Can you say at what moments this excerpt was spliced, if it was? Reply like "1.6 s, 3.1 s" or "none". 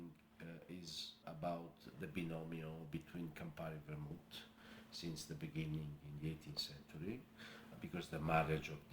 1.2 s, 1.9 s, 7.7 s